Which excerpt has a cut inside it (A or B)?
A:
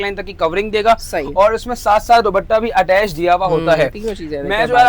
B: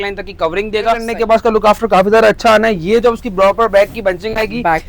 B